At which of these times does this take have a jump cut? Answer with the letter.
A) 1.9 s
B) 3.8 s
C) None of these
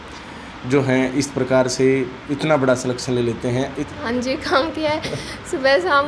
B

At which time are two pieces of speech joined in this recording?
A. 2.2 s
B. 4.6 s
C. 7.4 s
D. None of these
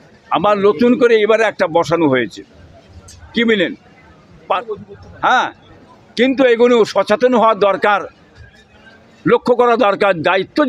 B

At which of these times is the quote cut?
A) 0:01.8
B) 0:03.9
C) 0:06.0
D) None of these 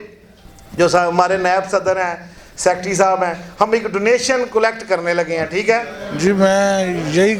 C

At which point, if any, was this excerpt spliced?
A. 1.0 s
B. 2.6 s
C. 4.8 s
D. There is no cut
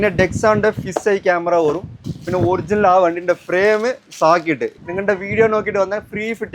C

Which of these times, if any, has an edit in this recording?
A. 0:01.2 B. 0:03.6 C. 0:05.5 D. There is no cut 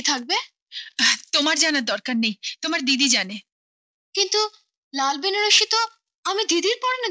D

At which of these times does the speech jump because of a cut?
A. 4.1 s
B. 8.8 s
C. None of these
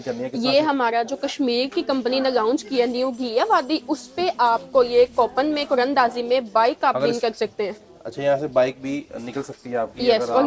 C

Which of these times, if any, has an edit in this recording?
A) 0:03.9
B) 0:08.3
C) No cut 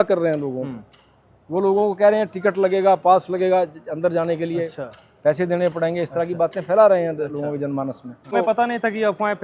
B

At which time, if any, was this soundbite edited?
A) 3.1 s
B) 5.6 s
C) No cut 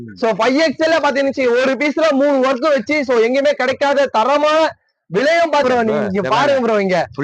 B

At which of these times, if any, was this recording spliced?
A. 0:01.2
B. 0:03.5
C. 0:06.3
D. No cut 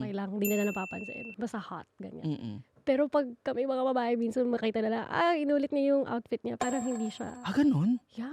D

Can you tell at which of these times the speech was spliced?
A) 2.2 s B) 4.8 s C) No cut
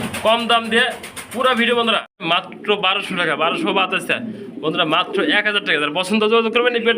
A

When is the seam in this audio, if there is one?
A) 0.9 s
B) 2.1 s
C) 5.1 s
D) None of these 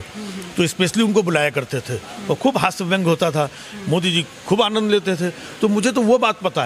D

